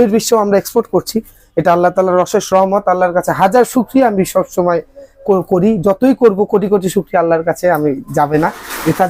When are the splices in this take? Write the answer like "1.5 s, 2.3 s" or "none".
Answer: none